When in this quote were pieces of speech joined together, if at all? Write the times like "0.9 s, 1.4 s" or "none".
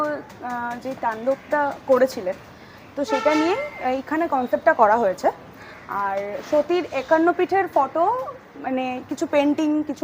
none